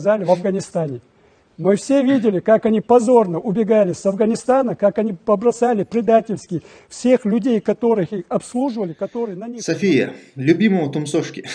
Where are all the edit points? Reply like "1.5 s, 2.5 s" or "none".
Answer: 9.5 s